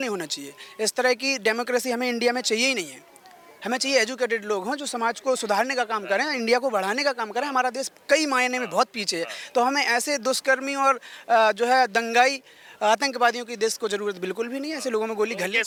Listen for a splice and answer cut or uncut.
uncut